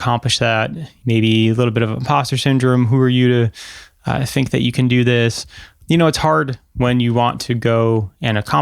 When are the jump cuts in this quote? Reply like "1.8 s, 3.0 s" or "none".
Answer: 0.9 s, 5.7 s